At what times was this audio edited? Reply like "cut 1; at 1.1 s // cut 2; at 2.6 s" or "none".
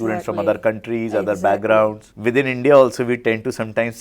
cut 1; at 2.1 s